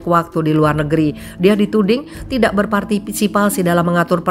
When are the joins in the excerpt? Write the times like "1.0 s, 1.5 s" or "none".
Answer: none